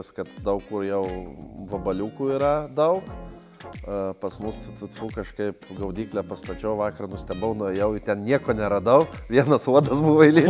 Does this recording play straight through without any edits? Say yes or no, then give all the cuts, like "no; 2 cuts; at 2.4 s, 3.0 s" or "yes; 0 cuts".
yes; 0 cuts